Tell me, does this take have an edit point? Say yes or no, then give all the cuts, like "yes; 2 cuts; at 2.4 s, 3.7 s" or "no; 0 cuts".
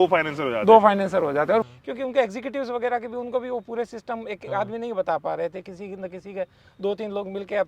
yes; 1 cut; at 1.7 s